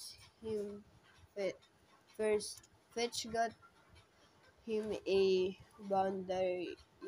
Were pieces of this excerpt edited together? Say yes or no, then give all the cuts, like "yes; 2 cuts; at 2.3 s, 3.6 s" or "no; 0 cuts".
no; 0 cuts